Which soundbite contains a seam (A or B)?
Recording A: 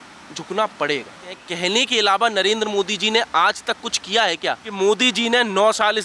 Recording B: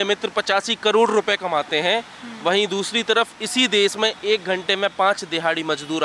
A